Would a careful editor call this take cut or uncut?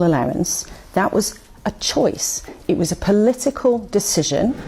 uncut